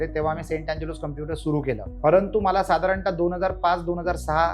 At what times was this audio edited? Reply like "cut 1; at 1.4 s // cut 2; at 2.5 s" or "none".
cut 1; at 1.9 s